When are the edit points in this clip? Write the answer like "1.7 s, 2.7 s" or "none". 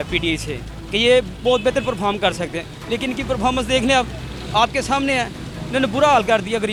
none

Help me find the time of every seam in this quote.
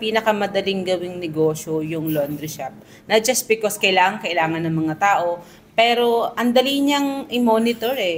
none

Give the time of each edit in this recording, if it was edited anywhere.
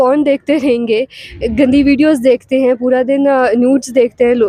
none

